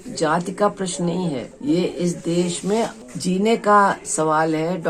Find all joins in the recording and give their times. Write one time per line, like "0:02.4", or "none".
0:01.5
0:03.0